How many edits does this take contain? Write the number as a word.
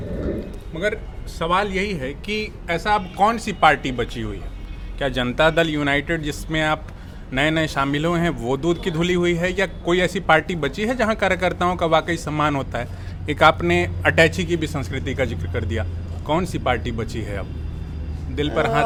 zero